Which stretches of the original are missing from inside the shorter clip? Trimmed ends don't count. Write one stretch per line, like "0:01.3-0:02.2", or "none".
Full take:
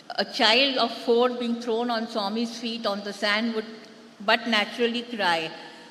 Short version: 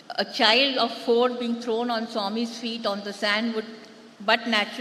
none